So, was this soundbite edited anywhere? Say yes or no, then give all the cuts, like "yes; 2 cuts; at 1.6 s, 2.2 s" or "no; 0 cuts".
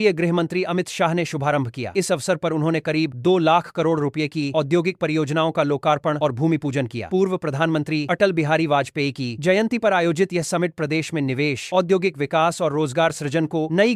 no; 0 cuts